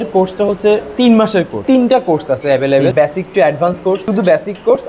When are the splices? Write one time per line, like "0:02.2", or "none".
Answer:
0:01.5
0:02.9
0:04.0